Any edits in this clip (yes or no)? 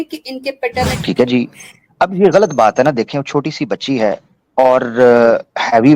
yes